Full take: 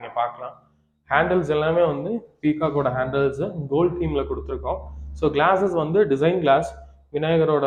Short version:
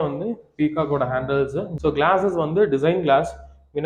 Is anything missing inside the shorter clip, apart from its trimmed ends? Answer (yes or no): yes